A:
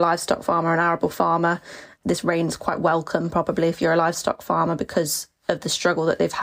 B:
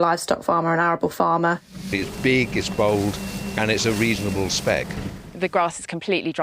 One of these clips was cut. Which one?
B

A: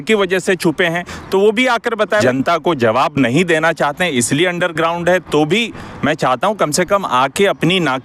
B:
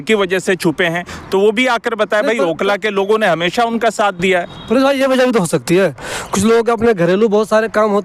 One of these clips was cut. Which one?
A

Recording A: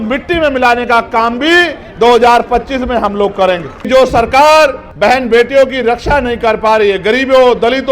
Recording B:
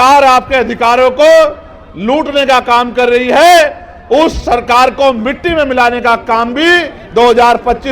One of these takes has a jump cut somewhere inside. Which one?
A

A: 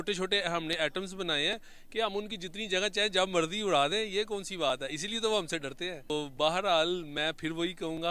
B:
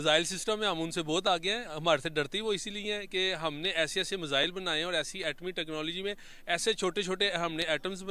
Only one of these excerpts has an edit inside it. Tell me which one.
A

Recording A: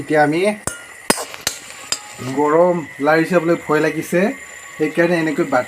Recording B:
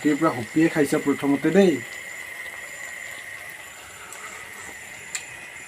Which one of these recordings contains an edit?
A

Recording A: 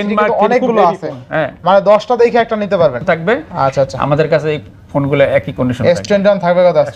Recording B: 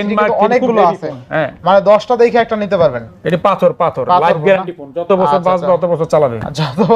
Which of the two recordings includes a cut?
A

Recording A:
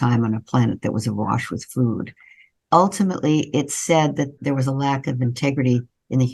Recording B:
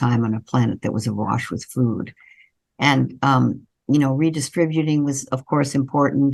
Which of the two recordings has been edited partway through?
A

